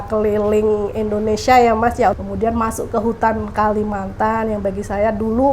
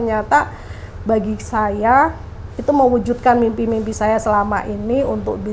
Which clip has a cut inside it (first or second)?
first